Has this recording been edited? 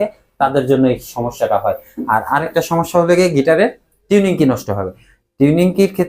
no; 0 cuts

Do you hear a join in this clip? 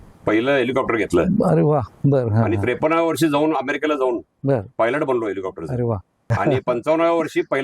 yes; 1 cut; at 6.2 s

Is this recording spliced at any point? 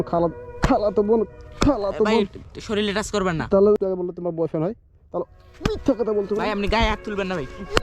yes; 1 cut; at 3.8 s

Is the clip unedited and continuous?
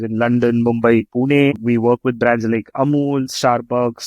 no; 1 cut; at 1.6 s

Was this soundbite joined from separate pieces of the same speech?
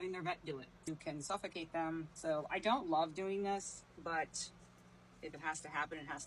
yes; 3 cuts; at 0.8 s, 2.1 s, 3.8 s

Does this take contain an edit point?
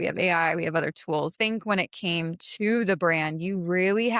yes; 1 cut; at 1.3 s

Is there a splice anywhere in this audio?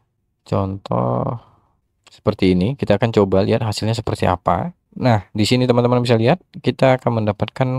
no; 0 cuts

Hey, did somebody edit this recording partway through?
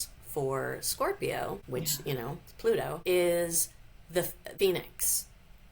no; 0 cuts

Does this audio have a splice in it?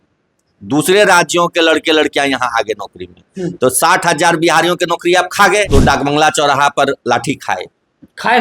yes; 1 cut; at 5.7 s

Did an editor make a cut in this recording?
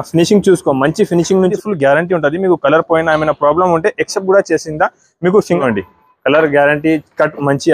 yes; 2 cuts; at 1.5 s, 5.6 s

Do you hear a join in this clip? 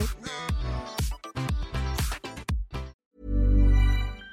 yes; 1 cut; at 3.0 s

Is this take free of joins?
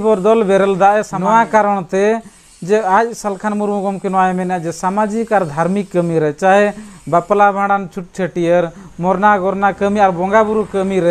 no; 1 cut; at 1.2 s

